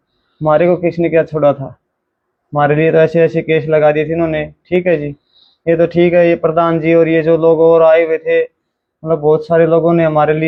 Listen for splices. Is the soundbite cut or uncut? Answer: uncut